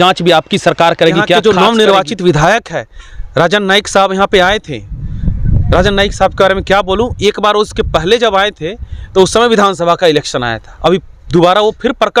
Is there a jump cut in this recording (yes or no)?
yes